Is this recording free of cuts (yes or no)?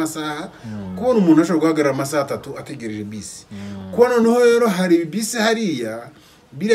yes